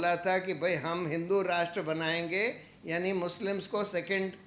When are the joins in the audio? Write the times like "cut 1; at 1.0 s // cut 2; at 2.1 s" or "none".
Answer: none